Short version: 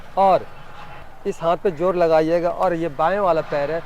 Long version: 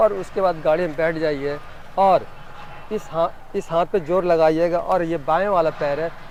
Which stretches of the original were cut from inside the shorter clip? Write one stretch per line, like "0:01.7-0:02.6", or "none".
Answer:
0:02.9-0:03.3